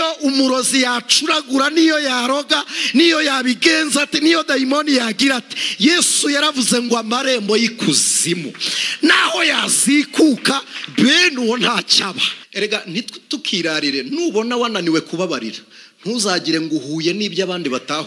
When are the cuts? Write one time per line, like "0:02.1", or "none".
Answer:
0:12.3